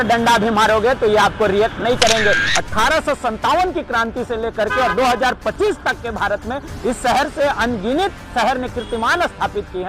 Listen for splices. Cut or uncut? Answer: cut